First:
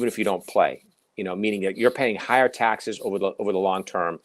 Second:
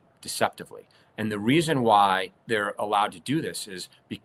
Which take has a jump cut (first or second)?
second